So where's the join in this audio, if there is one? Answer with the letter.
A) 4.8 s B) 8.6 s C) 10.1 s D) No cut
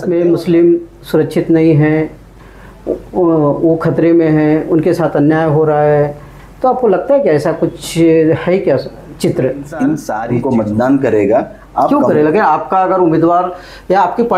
C